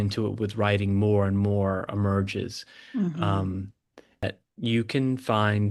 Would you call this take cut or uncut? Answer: cut